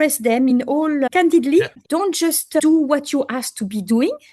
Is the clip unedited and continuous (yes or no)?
no